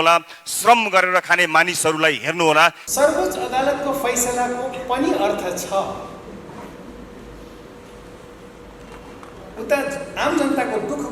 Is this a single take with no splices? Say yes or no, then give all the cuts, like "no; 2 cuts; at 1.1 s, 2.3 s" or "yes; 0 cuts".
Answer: no; 1 cut; at 2.8 s